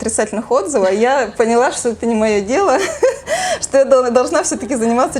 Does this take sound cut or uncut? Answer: uncut